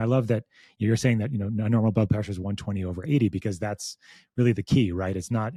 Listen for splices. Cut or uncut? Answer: uncut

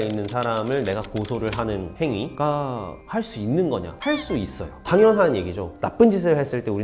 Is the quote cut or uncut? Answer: cut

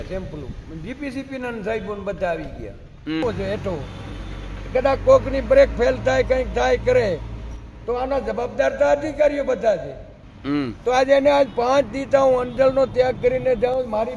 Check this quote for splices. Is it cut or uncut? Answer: cut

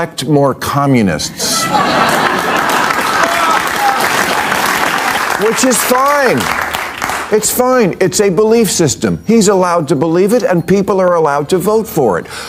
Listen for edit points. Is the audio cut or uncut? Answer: cut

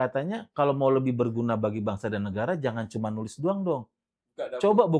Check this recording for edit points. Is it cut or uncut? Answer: uncut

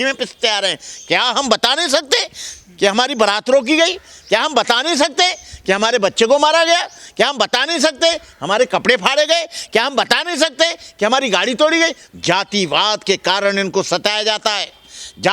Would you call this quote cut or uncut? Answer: cut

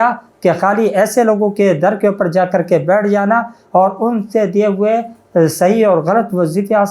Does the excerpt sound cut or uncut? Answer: uncut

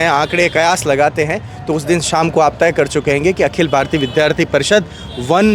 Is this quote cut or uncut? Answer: uncut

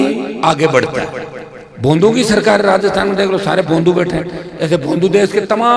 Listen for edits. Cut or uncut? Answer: uncut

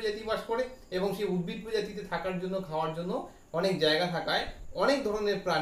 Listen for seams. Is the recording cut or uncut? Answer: uncut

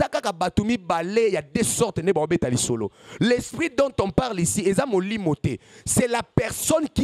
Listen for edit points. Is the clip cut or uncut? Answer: uncut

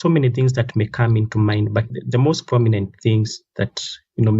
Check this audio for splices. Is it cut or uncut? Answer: uncut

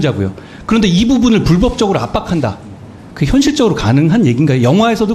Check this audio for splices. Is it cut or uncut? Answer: uncut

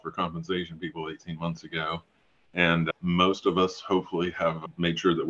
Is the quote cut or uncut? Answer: uncut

